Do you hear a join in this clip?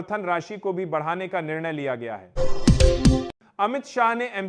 yes; 2 cuts; at 2.2 s, 3.3 s

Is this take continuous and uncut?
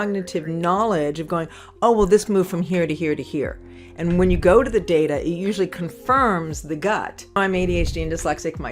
no; 1 cut; at 7.4 s

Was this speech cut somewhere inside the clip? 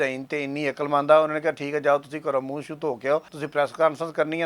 yes; 1 cut; at 3.4 s

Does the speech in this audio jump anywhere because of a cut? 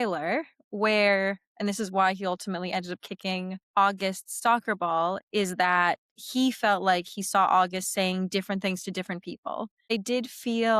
yes; 1 cut; at 9.9 s

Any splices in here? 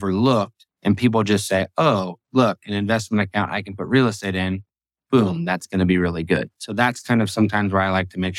no; 0 cuts

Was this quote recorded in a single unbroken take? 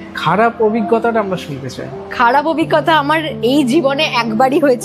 yes; 0 cuts

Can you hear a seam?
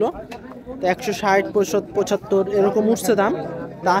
no; 0 cuts

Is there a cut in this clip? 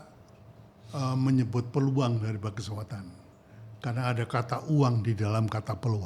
no; 0 cuts

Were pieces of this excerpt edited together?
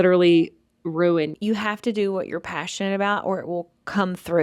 yes; 1 cut; at 1.3 s

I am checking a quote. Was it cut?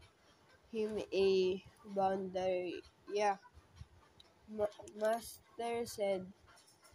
yes; 1 cut; at 4.5 s

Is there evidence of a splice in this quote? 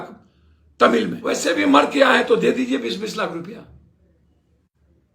yes; 1 cut; at 1.4 s

